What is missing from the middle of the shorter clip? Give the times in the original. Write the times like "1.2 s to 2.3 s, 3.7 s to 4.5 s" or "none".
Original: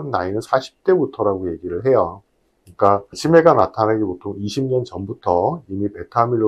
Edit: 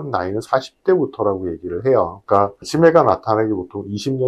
2.2 s to 2.7 s